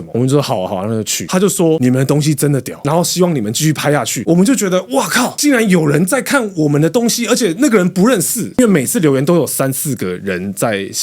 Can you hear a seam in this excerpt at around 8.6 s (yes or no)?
yes